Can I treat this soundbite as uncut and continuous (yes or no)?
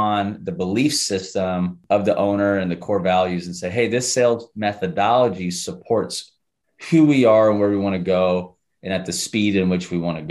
no